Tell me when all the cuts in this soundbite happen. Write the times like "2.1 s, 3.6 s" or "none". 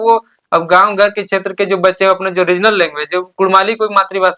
none